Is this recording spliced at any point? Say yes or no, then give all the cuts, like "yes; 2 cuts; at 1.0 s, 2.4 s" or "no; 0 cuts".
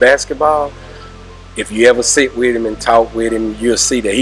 no; 0 cuts